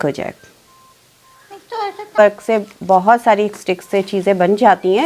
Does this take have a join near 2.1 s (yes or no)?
yes